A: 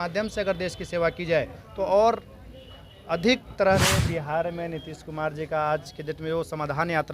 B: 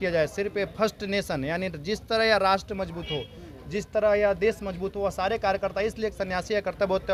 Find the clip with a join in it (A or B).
A